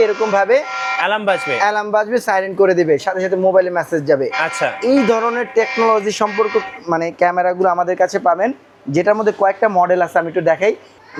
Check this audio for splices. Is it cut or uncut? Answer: uncut